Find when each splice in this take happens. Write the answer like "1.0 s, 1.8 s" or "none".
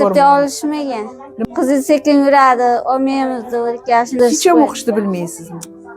1.2 s, 4.1 s

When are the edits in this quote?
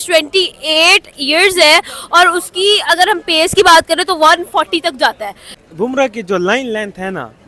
5.5 s

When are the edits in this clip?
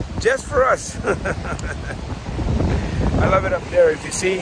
none

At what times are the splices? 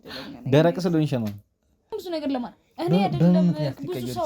1.9 s

